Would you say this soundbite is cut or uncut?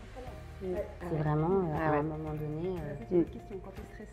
cut